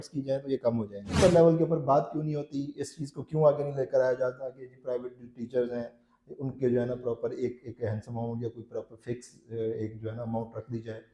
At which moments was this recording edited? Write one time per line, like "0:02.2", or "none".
0:01.0